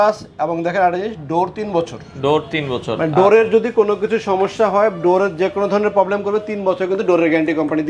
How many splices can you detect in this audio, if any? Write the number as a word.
zero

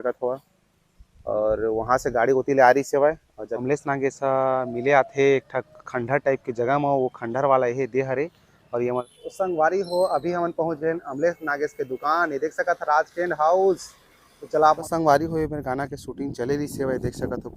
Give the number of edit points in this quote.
three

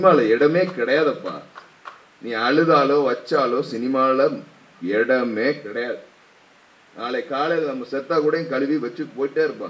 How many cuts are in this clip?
zero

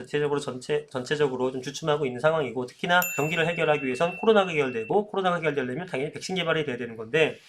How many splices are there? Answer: one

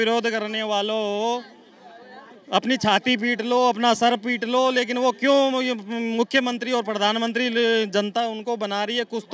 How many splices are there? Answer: zero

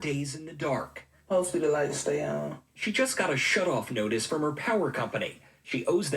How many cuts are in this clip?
one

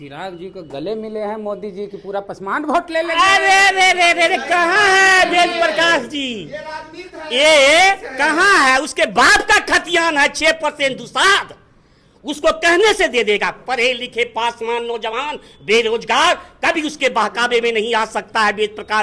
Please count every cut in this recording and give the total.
zero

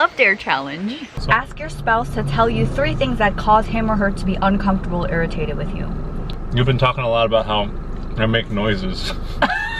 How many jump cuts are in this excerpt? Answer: two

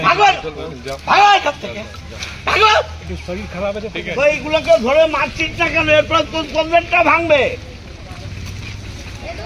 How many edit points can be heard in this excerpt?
one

